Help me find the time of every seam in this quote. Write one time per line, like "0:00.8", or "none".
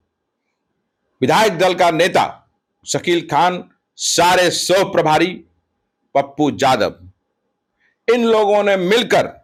none